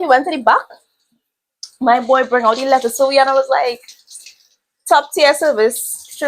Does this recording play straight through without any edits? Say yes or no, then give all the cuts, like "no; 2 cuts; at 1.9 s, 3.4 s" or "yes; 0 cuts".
yes; 0 cuts